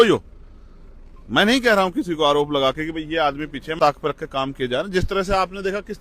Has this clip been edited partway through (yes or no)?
yes